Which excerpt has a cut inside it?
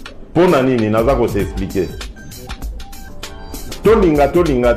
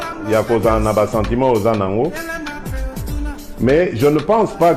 second; 2 cuts; at 2.2 s, 3.4 s

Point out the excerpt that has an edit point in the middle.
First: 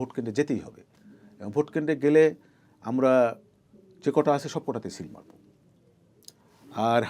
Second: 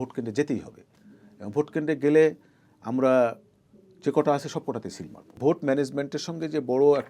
second; 1 cut; at 5.4 s

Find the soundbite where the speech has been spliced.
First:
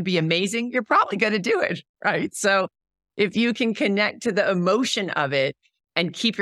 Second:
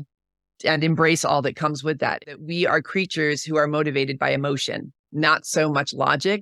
second; 1 cut; at 2.3 s

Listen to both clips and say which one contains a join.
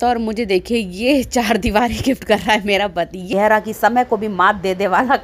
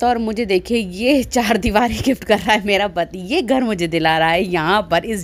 first; 1 cut; at 3.3 s

